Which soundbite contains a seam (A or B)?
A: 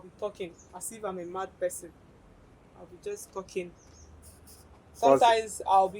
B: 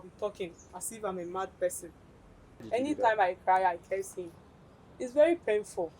B